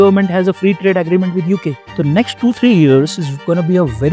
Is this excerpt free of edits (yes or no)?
no